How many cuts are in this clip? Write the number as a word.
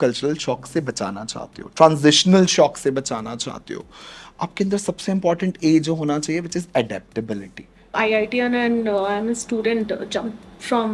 one